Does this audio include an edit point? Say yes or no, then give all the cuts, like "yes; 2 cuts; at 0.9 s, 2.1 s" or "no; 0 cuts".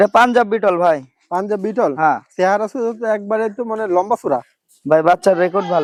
no; 0 cuts